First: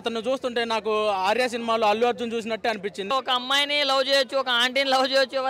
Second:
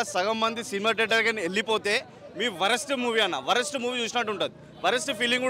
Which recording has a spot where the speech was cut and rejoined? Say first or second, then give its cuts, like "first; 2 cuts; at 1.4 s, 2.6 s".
first; 1 cut; at 3.1 s